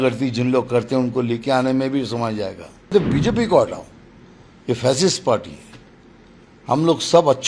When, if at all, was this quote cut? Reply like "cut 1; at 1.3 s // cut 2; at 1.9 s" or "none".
cut 1; at 2.9 s